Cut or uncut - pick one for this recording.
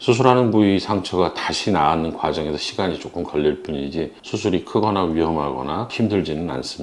cut